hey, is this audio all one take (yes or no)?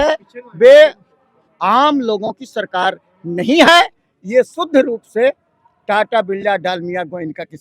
yes